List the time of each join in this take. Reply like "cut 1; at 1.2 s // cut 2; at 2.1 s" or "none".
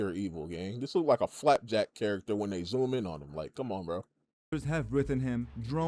none